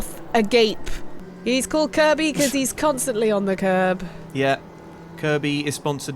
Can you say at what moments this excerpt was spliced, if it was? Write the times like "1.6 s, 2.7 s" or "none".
1.1 s